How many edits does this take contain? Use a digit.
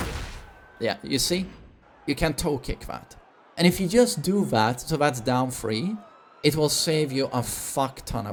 0